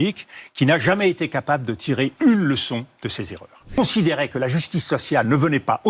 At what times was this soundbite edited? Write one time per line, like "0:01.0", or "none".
0:03.8